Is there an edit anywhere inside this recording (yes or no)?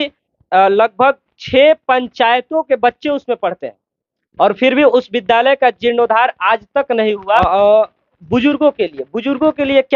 yes